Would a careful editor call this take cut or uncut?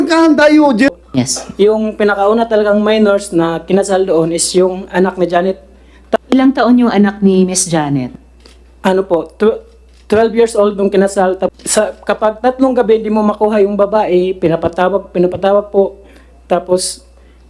cut